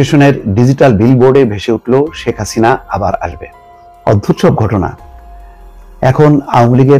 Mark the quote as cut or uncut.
uncut